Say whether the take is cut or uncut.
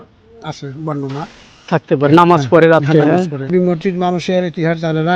cut